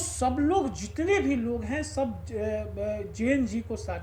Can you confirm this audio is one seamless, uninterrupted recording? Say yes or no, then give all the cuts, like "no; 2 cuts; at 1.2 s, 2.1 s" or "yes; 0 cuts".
yes; 0 cuts